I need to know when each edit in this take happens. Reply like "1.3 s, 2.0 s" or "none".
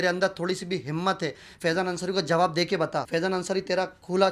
3.1 s